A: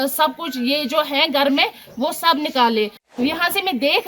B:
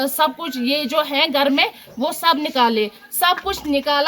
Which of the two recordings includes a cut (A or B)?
A